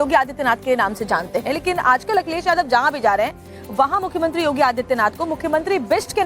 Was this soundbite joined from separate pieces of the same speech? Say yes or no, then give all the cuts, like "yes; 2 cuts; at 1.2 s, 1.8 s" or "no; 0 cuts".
yes; 1 cut; at 1.6 s